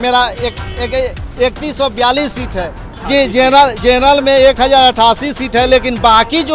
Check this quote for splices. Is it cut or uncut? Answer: cut